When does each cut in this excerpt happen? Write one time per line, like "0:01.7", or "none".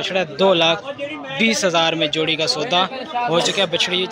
none